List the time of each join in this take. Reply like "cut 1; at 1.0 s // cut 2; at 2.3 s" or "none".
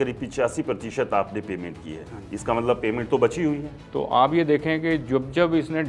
cut 1; at 3.7 s